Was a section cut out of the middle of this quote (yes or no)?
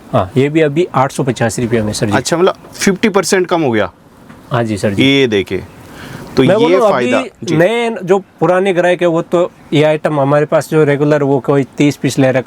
no